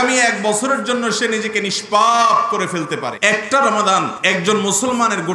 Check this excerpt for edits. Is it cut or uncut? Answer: cut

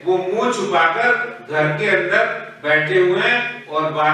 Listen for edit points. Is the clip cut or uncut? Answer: uncut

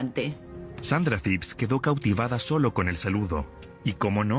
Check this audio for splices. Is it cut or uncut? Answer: cut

